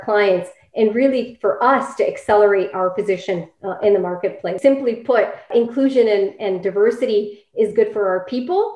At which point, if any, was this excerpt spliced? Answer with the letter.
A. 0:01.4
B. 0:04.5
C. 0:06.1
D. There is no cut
B